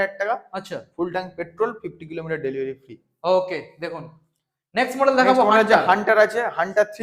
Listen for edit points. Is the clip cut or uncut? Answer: uncut